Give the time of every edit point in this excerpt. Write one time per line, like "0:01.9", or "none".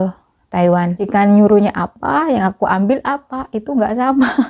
0:01.0

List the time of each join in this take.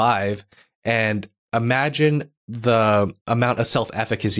0:03.2

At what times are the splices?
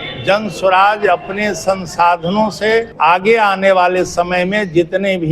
0:02.9

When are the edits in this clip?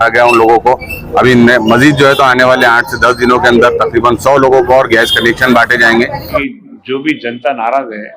0:06.4

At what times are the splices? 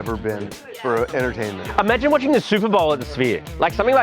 0:01.6

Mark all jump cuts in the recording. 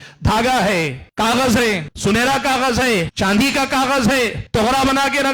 0:01.0
0:01.9
0:03.1
0:04.4

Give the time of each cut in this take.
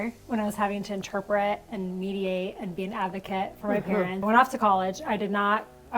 0:04.2

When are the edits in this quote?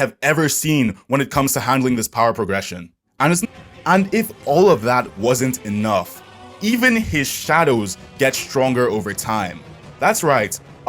0:03.4

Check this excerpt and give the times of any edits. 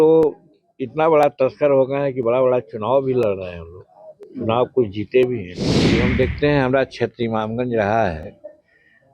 0:06.0

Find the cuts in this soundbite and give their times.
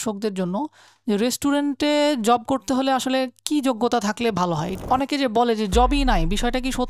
0:04.8

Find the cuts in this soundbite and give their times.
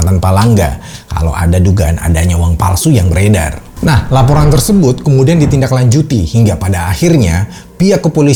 none

